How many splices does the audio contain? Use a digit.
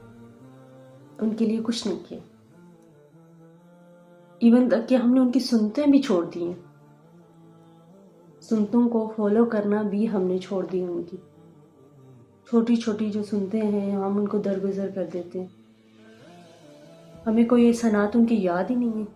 4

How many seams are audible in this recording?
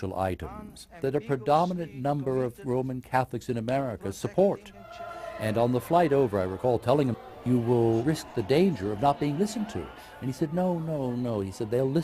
1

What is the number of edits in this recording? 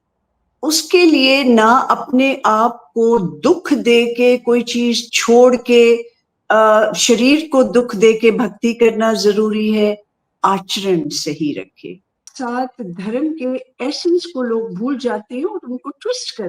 1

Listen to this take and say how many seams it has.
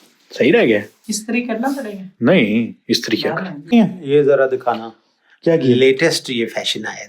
1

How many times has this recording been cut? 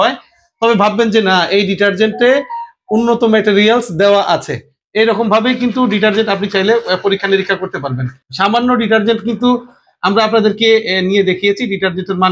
0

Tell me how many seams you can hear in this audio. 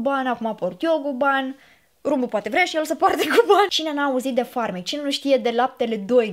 1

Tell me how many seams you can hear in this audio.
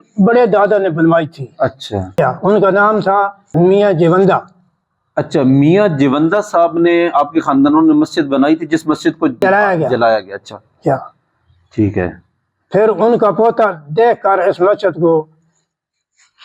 3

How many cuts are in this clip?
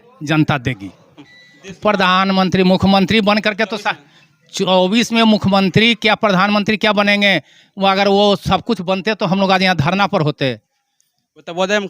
1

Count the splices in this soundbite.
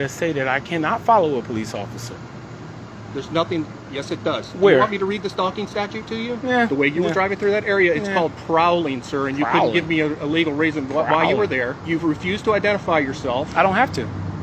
2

